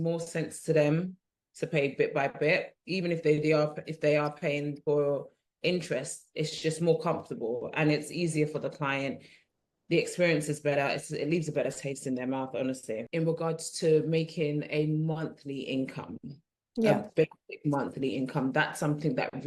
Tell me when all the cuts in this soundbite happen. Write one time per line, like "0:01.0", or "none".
0:13.0